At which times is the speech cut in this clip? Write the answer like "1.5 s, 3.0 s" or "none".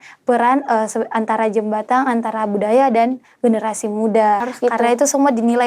4.5 s